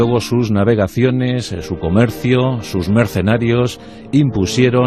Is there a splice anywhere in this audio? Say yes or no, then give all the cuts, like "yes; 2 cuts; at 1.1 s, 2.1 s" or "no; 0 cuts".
no; 0 cuts